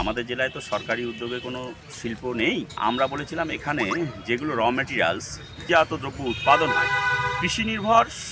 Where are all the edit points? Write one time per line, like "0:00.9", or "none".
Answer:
0:02.8
0:05.7